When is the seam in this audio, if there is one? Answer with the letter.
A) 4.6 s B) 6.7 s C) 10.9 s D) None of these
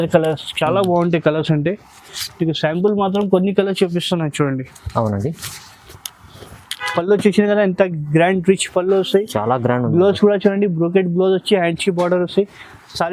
B